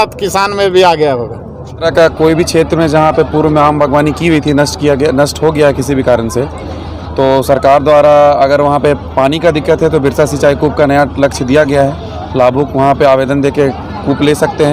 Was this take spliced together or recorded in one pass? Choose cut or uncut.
uncut